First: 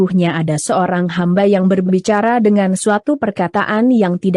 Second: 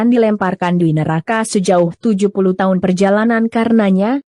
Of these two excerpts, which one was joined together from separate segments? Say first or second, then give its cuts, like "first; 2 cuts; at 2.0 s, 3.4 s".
first; 1 cut; at 1.0 s